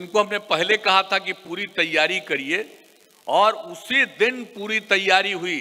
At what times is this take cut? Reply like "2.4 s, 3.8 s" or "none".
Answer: none